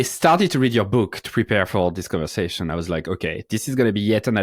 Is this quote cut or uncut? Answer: uncut